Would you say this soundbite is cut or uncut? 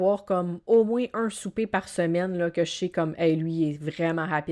uncut